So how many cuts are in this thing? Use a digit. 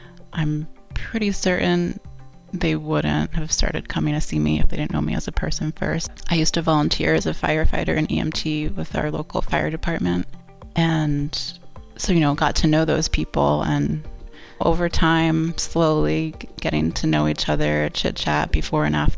1